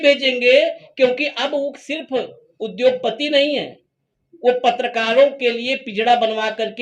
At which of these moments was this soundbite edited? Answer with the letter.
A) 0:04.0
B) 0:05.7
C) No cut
C